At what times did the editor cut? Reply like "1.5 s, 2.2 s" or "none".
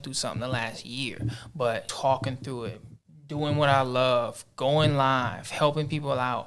1.9 s